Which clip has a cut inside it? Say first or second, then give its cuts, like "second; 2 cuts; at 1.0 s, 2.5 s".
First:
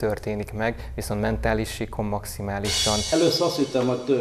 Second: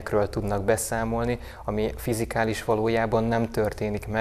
first; 1 cut; at 3.1 s